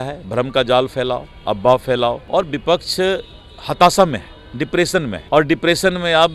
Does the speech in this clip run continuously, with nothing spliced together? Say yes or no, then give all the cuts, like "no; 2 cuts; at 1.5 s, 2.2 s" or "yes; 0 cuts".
no; 2 cuts; at 2.2 s, 5.2 s